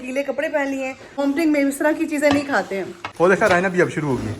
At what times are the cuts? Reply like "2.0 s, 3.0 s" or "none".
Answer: 1.2 s, 3.0 s